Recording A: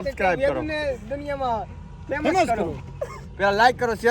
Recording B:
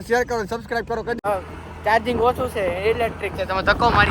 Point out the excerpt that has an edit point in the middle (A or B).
B